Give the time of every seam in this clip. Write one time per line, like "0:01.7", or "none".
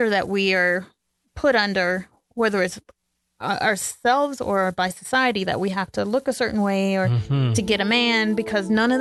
none